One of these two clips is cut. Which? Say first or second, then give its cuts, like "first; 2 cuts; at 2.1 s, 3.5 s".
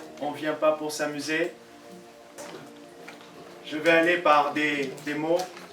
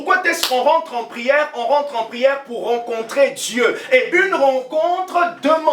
first; 1 cut; at 2.4 s